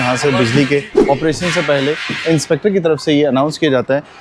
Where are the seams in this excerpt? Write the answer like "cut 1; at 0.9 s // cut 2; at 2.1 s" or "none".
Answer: cut 1; at 0.9 s